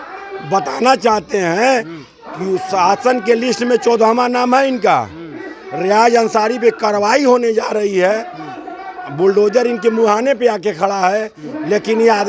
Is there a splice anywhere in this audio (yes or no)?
no